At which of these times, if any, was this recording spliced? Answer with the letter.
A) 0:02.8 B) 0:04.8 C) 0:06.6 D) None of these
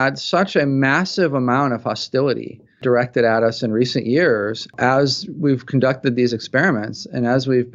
A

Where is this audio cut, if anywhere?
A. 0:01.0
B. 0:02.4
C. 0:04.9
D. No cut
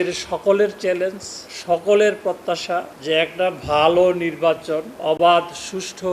C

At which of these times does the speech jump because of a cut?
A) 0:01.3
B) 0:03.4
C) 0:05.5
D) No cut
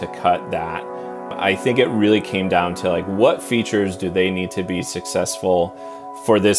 A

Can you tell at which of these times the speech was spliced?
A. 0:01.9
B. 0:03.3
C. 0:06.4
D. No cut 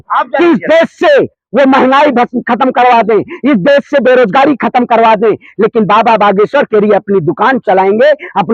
D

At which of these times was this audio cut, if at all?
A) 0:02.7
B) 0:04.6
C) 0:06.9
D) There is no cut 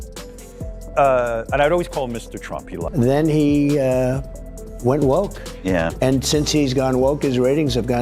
A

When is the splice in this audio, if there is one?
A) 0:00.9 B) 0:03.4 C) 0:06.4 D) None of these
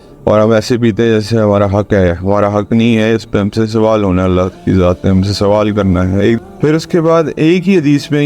C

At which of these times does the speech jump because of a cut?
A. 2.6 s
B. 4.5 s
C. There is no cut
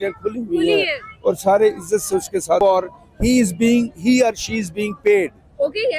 A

